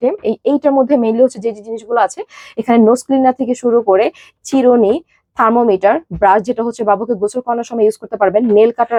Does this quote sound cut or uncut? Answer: uncut